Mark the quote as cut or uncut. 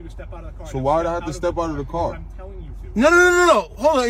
uncut